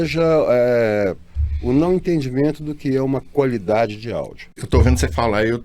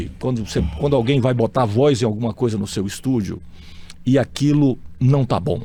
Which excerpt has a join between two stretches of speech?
first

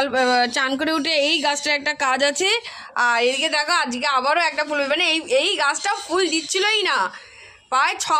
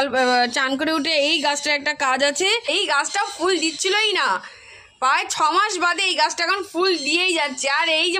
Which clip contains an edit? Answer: second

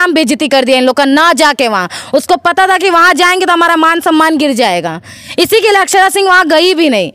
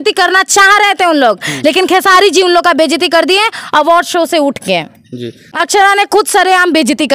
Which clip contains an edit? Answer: second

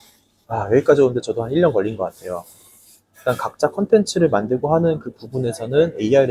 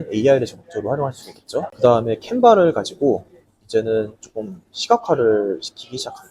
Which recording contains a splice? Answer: second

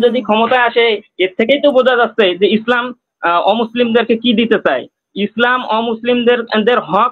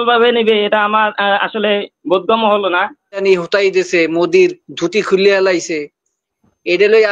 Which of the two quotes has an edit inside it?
second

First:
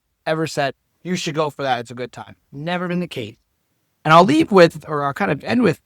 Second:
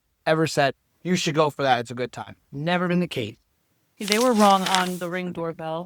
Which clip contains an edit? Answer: second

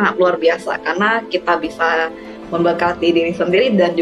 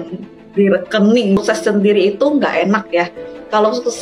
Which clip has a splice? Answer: second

